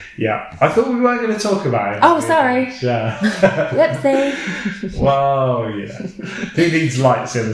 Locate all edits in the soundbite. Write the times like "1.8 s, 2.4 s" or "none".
none